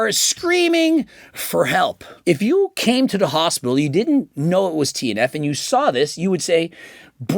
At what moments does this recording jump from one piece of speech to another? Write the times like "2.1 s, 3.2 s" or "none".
2.1 s